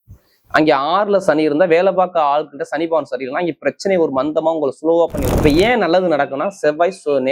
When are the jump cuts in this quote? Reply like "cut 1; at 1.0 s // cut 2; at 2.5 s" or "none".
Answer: cut 1; at 5.4 s